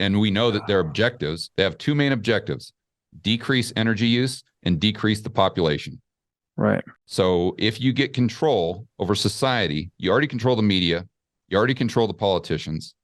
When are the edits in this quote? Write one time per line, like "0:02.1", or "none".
0:07.0